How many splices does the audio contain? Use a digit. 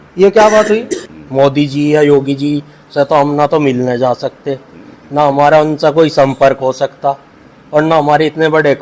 1